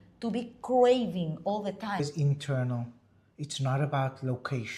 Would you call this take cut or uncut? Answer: cut